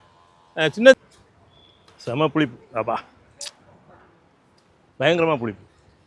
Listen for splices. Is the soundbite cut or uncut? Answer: cut